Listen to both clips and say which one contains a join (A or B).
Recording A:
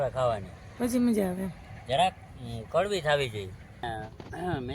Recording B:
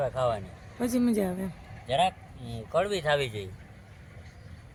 A